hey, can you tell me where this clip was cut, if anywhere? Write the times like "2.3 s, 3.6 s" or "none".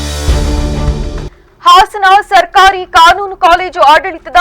1.3 s